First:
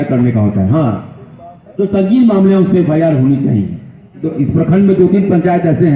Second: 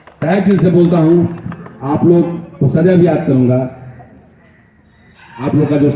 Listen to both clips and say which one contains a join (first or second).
first